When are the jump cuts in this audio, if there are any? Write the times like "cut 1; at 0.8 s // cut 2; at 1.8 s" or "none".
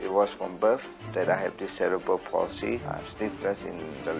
cut 1; at 2.9 s